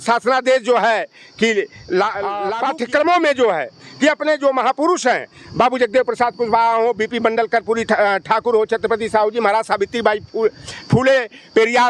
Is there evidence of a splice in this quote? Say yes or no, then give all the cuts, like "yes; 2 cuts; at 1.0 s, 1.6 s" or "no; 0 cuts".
yes; 1 cut; at 2.4 s